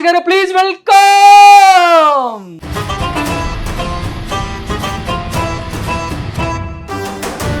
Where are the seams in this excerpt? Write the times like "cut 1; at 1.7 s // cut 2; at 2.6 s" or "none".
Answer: cut 1; at 2.5 s